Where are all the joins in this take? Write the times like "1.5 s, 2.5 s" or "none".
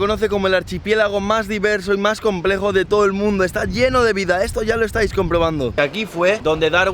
5.7 s